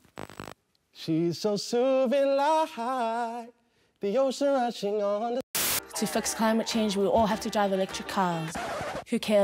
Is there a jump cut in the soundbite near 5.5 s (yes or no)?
yes